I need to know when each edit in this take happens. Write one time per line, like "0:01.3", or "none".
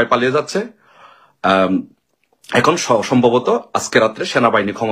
none